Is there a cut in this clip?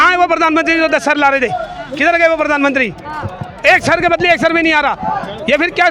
no; 0 cuts

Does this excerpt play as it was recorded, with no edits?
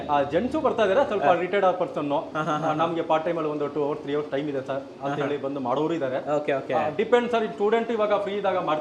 yes; 0 cuts

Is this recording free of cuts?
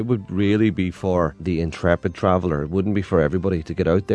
no; 1 cut; at 1.4 s

